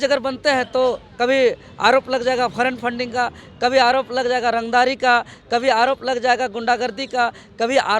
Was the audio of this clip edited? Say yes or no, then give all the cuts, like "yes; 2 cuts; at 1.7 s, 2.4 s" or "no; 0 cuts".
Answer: no; 0 cuts